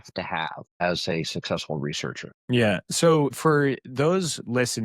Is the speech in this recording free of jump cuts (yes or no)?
no